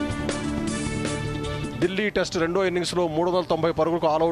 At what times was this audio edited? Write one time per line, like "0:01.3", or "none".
0:01.7